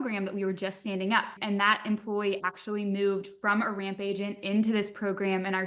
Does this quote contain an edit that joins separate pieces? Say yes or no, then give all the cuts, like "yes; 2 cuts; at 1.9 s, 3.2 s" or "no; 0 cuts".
yes; 1 cut; at 1.4 s